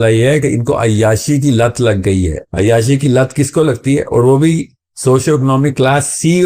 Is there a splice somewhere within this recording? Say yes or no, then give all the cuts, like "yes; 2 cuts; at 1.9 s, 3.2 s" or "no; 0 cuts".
no; 0 cuts